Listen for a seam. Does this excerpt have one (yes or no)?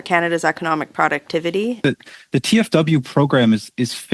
yes